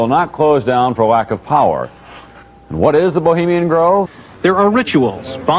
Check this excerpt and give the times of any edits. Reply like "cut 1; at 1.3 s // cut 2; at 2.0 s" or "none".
cut 1; at 4.2 s